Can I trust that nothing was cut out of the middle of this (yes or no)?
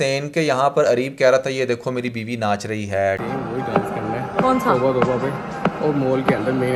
yes